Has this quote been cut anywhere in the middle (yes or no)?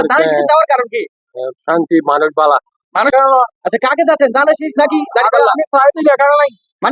yes